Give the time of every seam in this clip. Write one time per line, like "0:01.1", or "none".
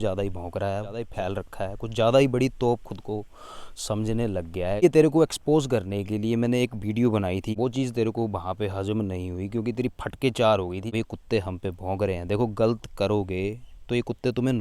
0:01.1
0:04.8
0:07.5
0:10.9

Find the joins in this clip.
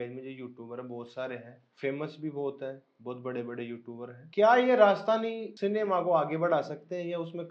0:01.6
0:04.2
0:05.4

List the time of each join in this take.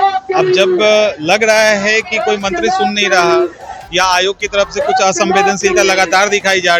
none

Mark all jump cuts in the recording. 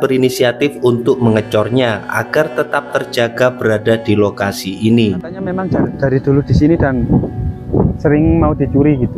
0:05.6

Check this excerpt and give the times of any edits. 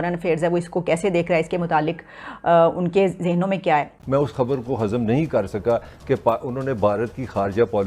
0:04.0

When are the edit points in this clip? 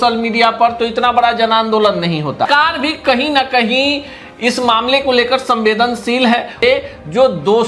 0:02.5
0:06.6

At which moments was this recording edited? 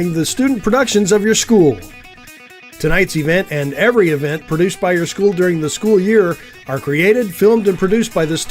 0:01.1

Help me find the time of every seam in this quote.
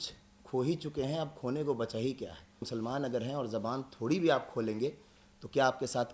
0:02.7

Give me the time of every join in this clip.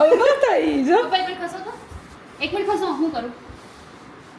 none

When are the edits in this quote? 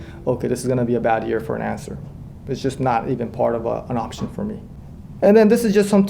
none

